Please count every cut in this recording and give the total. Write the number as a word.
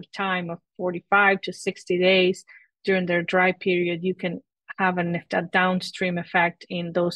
one